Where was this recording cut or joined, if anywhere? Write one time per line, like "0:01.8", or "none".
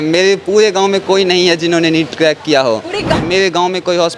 0:03.1